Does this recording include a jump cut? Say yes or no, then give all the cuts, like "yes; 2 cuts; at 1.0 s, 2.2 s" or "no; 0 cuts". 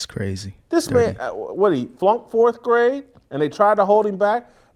no; 0 cuts